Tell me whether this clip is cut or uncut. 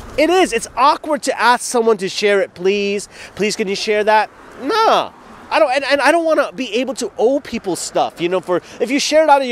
uncut